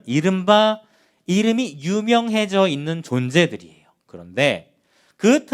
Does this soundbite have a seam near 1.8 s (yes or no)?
no